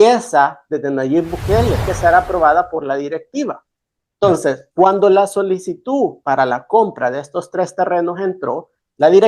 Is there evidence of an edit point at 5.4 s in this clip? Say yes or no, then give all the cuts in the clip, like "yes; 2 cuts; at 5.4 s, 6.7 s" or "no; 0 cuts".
no; 1 cut; at 1.9 s